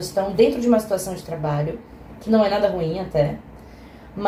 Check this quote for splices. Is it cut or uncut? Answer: uncut